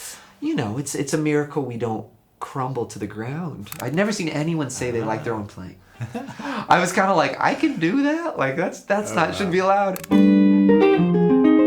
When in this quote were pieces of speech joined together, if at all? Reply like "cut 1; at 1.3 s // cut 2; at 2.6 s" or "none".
cut 1; at 3.7 s // cut 2; at 10.0 s